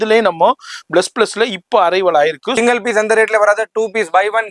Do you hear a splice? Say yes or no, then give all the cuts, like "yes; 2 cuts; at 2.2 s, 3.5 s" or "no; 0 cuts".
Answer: yes; 1 cut; at 2.6 s